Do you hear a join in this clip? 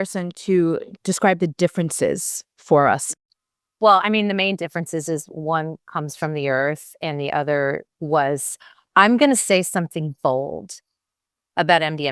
yes; 3 cuts; at 3.0 s, 7.9 s, 8.5 s

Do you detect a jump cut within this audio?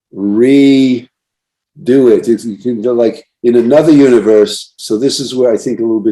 yes; 1 cut; at 4.8 s

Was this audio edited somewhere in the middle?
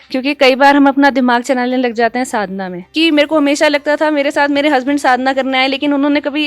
yes; 1 cut; at 2.9 s

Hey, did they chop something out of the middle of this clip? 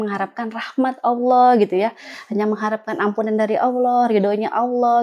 no; 0 cuts

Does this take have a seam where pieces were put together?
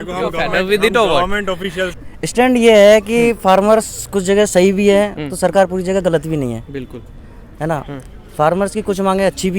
no; 0 cuts

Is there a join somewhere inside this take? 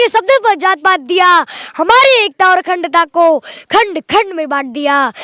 no; 0 cuts

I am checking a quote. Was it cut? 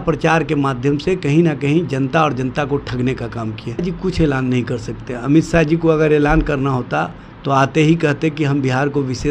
yes; 1 cut; at 3.8 s

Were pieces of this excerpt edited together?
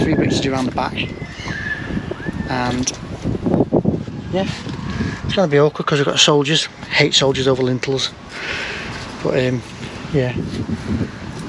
no; 0 cuts

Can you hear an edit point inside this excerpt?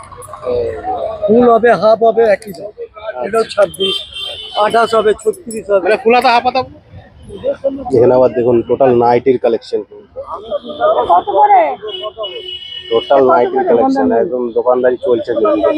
yes; 1 cut; at 6.6 s

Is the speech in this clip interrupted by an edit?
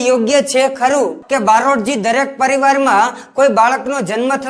yes; 1 cut; at 1.2 s

